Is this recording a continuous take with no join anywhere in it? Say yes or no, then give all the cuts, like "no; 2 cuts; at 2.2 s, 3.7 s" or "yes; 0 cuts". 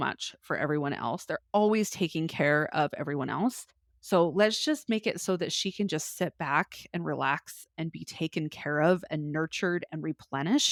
yes; 0 cuts